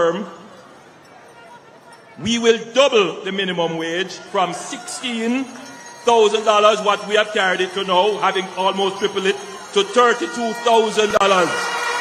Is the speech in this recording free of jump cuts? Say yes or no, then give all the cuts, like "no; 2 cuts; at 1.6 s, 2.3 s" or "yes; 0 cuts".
yes; 0 cuts